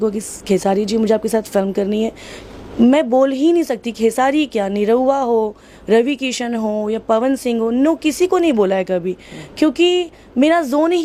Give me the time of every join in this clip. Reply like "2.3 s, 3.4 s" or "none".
none